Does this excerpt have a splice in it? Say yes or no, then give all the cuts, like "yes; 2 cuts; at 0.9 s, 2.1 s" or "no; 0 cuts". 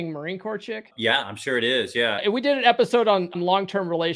yes; 3 cuts; at 0.9 s, 2.2 s, 3.4 s